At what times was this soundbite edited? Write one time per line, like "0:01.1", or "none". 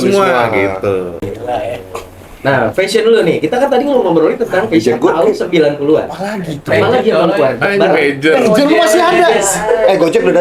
0:01.2